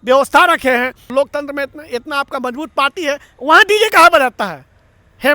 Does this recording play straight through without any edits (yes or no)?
no